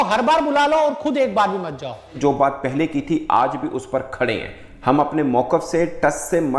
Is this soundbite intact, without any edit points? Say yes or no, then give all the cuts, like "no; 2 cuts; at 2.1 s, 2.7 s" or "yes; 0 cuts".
no; 1 cut; at 2.2 s